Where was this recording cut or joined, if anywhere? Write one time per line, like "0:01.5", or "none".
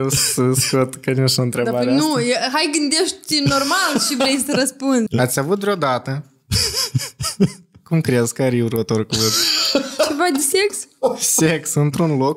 0:05.1